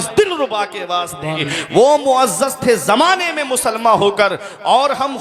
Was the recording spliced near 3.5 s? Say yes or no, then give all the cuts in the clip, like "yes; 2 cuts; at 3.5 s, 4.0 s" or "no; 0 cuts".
no; 1 cut; at 1.5 s